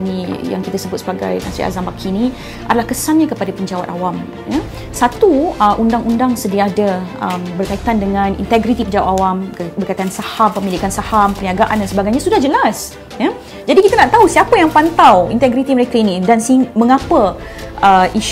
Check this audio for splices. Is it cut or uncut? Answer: uncut